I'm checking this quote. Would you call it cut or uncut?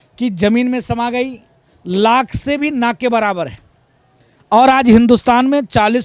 uncut